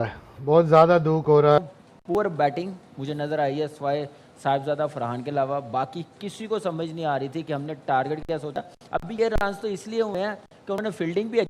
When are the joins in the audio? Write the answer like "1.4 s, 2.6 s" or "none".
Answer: 1.6 s